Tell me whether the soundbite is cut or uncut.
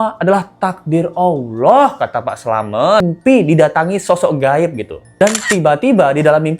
cut